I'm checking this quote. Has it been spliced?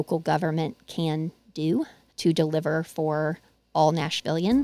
yes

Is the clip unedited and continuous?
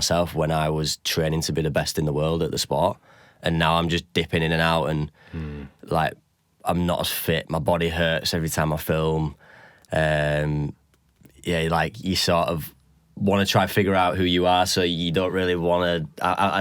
yes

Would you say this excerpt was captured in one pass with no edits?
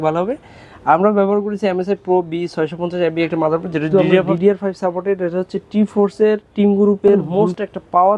no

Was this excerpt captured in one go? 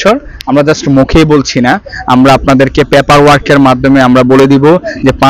yes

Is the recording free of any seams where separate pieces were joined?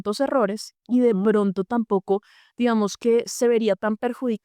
yes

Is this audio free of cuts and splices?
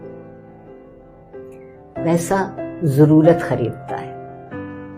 yes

